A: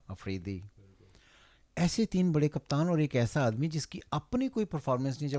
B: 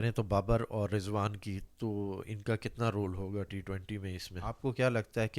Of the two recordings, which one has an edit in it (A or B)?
B